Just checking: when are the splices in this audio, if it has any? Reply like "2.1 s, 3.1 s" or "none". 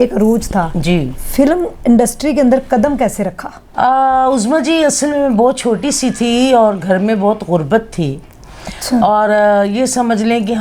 none